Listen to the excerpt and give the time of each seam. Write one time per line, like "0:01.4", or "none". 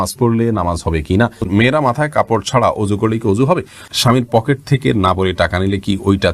0:01.5
0:03.9